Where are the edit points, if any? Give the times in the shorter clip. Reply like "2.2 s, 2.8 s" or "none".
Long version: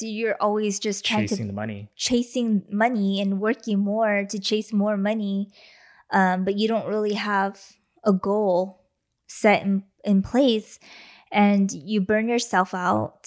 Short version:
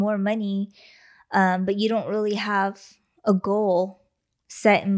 none